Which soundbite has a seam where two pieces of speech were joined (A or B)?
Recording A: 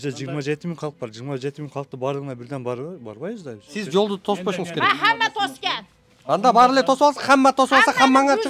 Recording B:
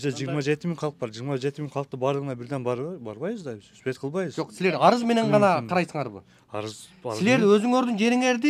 A